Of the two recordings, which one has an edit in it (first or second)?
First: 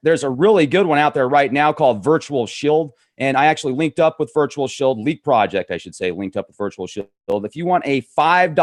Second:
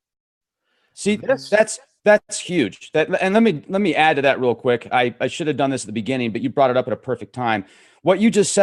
second